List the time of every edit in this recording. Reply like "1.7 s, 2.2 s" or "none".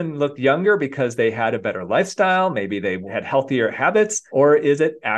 3.1 s, 4.2 s